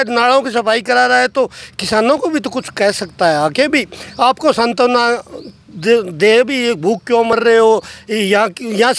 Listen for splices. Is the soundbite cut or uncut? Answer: uncut